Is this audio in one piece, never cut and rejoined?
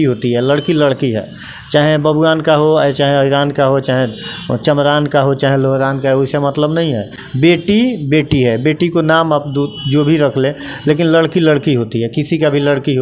yes; 0 cuts

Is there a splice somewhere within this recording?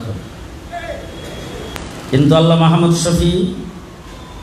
yes; 1 cut; at 1.8 s

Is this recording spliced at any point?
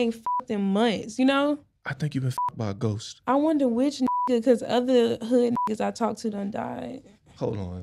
no; 0 cuts

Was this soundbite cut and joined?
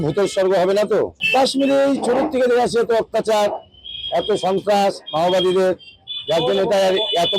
yes; 1 cut; at 1.2 s

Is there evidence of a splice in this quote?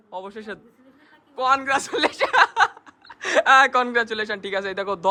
no; 0 cuts

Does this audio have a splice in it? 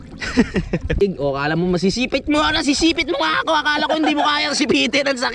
yes; 1 cut; at 1.0 s

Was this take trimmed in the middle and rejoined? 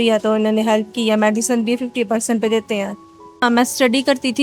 no; 0 cuts

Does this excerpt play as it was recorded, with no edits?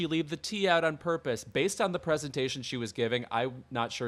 yes; 0 cuts

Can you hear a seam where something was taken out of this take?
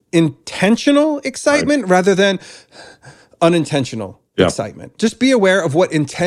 yes; 1 cut; at 4.9 s

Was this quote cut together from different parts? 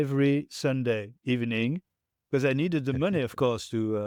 no; 0 cuts

